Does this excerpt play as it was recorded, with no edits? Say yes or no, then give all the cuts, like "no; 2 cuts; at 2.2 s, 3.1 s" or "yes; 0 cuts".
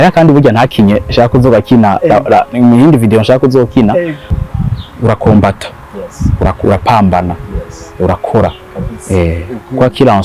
no; 1 cut; at 4.2 s